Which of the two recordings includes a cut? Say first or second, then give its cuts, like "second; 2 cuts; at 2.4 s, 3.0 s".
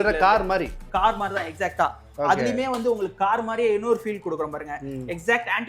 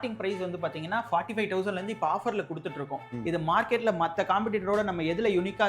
second; 1 cut; at 3.1 s